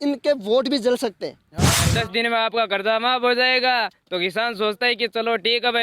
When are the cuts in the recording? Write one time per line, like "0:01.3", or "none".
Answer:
0:01.9